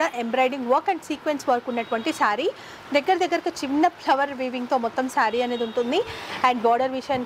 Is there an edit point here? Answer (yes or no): no